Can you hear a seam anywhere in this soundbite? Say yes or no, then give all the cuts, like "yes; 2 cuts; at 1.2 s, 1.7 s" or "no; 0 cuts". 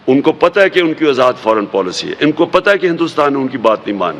no; 0 cuts